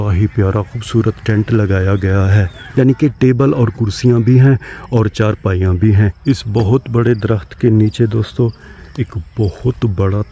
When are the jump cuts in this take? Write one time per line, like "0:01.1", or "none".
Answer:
0:02.5
0:06.2